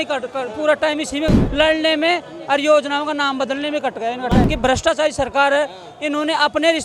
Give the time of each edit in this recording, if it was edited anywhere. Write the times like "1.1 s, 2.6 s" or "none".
1.4 s, 4.5 s